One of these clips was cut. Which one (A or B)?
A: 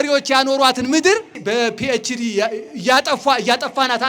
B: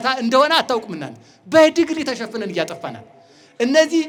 A